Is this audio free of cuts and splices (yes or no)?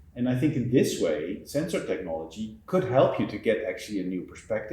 no